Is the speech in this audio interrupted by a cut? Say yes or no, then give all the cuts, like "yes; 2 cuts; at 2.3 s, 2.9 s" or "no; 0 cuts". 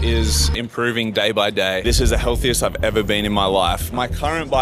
no; 0 cuts